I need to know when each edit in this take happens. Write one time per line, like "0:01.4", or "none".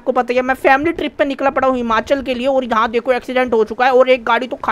none